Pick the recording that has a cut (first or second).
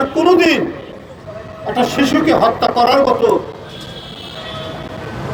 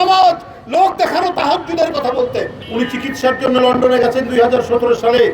second